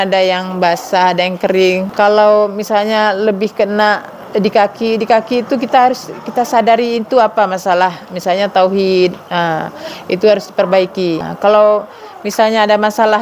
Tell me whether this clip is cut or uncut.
cut